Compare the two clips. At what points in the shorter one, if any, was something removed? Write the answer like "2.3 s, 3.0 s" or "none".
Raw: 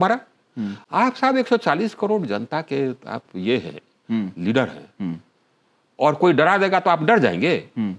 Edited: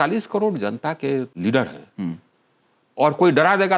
1.3 s